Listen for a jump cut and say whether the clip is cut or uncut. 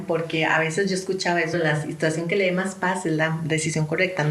cut